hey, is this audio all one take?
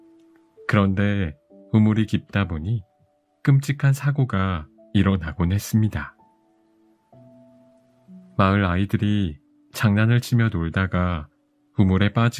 no; 2 cuts; at 6.2 s, 8.4 s

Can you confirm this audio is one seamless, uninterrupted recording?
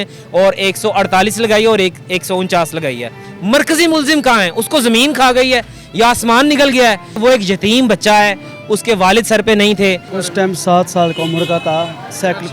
no; 3 cuts; at 3.2 s, 7.1 s, 10.1 s

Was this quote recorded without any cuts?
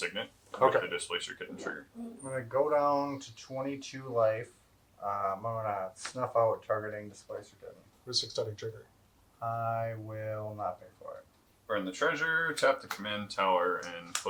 yes; 0 cuts

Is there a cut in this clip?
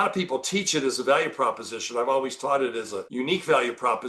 yes; 1 cut; at 3.0 s

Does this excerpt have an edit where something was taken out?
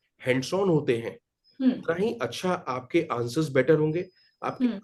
no; 0 cuts

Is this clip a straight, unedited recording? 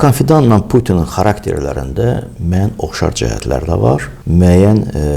no; 1 cut; at 4.1 s

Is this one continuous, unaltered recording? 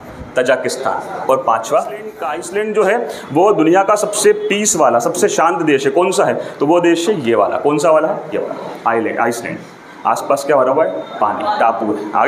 no; 1 cut; at 2.3 s

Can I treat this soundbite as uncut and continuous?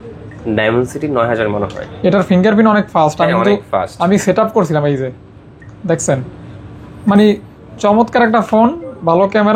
yes; 0 cuts

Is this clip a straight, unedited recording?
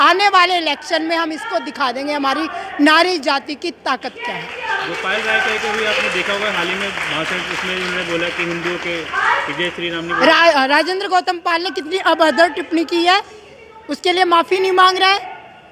yes; 0 cuts

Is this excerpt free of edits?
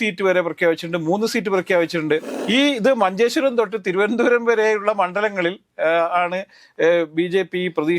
no; 1 cut; at 2.3 s

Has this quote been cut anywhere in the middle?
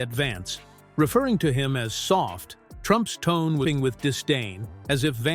yes; 1 cut; at 3.6 s

